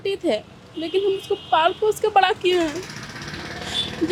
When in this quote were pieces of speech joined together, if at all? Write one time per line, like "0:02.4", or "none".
none